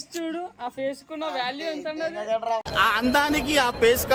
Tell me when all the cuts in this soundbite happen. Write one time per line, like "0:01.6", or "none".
none